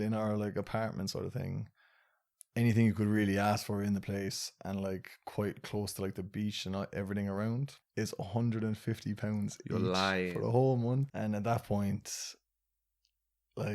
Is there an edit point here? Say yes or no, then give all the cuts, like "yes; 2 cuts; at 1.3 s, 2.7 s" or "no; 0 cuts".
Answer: yes; 2 cuts; at 7.8 s, 11.1 s